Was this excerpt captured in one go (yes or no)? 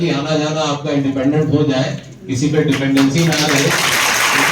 yes